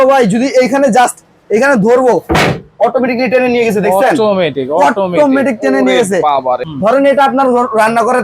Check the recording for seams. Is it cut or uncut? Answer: cut